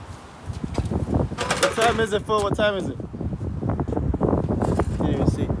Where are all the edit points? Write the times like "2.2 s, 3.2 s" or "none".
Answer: 1.3 s